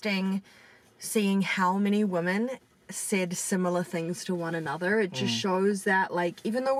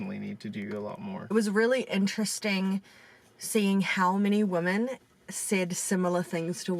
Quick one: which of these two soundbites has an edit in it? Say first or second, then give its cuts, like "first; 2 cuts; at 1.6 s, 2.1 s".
second; 1 cut; at 1.3 s